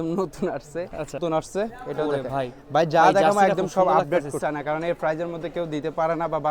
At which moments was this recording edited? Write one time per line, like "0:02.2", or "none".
0:01.2
0:04.4